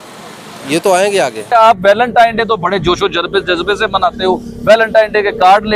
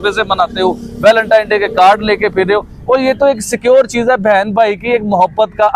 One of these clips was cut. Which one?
first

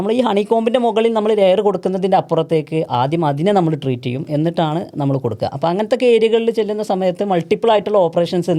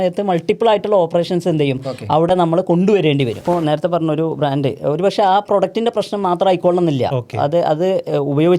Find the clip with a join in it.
second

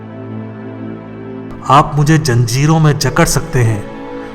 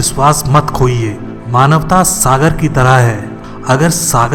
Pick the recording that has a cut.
first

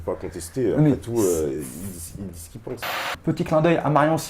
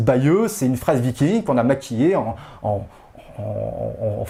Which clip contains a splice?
first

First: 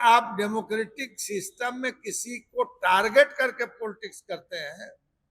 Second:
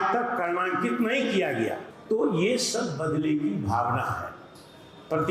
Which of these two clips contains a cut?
second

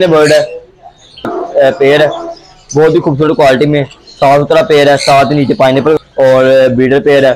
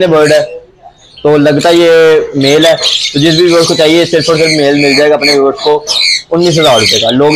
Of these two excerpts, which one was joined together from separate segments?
first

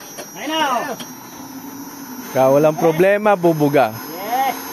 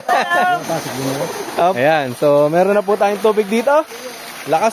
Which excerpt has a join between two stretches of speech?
second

